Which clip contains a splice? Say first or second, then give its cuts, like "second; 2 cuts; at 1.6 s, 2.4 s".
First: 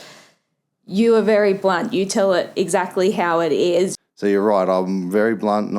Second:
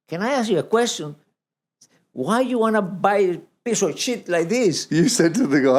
first; 1 cut; at 4.0 s